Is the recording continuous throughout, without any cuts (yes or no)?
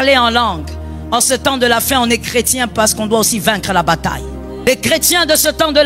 no